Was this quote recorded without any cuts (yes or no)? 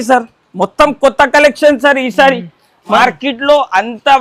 no